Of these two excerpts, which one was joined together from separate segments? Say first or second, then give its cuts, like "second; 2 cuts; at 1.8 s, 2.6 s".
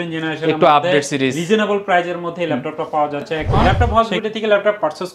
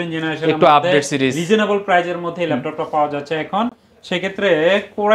first; 1 cut; at 3.6 s